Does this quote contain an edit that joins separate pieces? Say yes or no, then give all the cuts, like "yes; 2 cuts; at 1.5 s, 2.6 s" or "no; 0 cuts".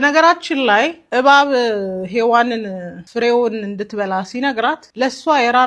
yes; 3 cuts; at 0.9 s, 3.0 s, 4.8 s